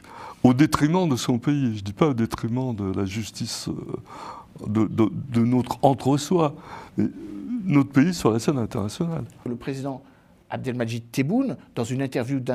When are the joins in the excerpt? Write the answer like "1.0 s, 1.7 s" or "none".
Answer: 9.5 s